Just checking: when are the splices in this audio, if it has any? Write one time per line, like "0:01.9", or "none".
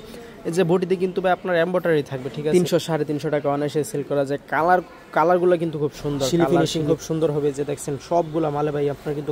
0:02.5
0:06.5